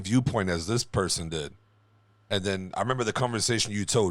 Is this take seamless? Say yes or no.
yes